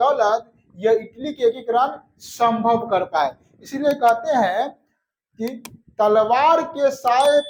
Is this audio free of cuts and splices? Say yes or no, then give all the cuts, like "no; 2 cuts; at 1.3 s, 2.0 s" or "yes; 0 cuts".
yes; 0 cuts